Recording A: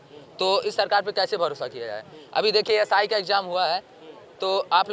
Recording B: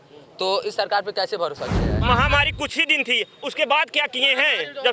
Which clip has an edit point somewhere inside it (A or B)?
B